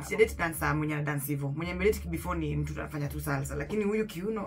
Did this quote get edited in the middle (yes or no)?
no